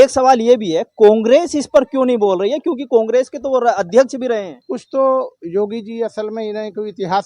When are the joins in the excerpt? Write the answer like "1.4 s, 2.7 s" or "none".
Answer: 4.6 s

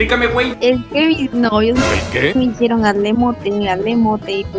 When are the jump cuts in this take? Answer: none

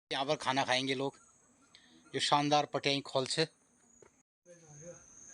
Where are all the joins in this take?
4.3 s

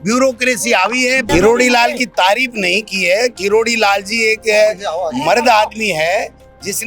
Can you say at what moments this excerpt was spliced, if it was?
1.3 s

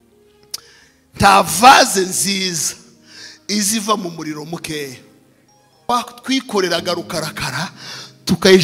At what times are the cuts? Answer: 5.9 s

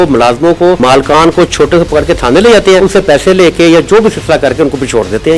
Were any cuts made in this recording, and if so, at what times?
0.8 s, 2.8 s

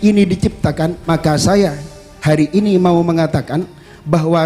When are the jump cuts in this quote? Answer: 1.0 s

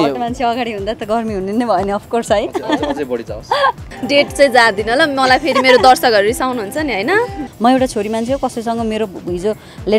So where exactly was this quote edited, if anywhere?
3.9 s, 7.4 s

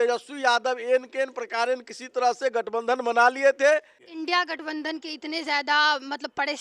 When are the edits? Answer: 4.0 s

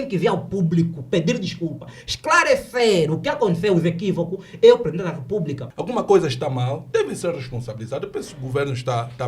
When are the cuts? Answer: 5.6 s

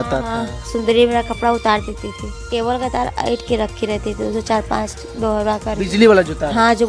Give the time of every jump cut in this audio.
2.5 s

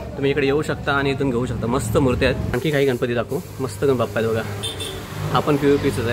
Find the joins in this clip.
2.6 s

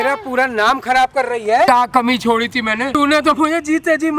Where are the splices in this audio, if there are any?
1.7 s, 3.0 s

